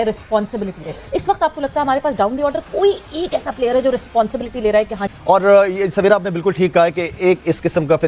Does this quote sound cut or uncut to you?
cut